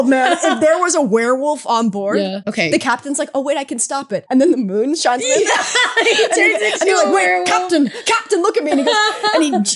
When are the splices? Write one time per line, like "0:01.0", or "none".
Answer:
0:02.4
0:04.2